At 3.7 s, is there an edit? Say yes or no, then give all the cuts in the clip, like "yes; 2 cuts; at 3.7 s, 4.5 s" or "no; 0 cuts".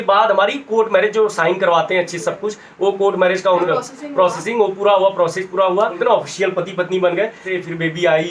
yes; 3 cuts; at 3.7 s, 6.0 s, 7.5 s